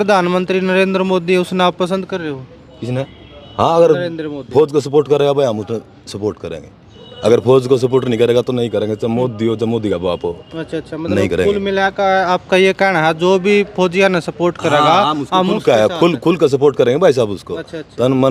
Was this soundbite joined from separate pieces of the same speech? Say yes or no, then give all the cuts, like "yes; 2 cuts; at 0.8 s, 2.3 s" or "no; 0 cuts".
no; 0 cuts